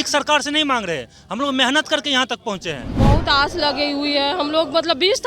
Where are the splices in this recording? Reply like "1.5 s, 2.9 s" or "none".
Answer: 2.9 s